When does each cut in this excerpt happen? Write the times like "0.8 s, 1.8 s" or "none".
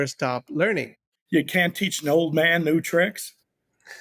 1.2 s

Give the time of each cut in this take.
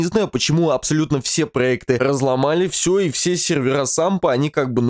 2.0 s

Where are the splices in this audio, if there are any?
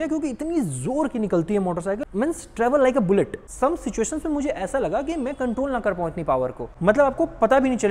2.0 s, 3.4 s, 6.7 s

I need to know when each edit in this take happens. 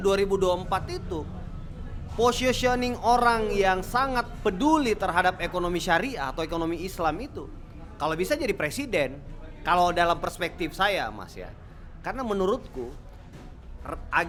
none

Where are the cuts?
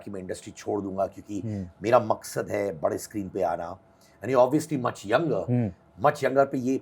none

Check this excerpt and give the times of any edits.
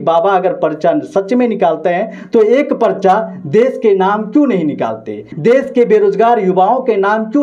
5.3 s

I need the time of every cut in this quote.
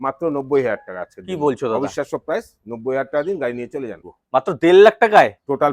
4.0 s

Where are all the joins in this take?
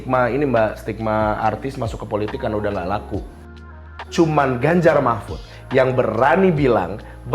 3.8 s

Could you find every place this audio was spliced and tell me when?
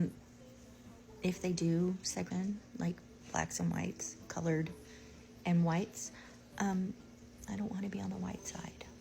2.3 s

